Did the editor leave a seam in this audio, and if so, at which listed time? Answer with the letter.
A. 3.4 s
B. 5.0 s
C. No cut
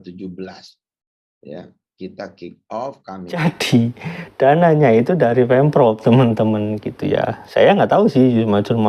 A